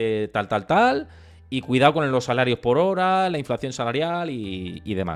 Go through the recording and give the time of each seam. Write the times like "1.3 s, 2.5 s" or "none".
none